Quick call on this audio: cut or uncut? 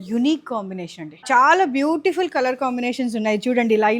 cut